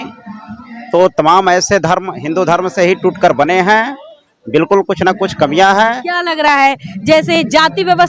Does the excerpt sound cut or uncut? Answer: uncut